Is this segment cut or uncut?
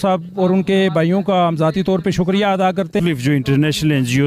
cut